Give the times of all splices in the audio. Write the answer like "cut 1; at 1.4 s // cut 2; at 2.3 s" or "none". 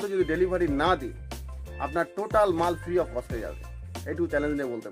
none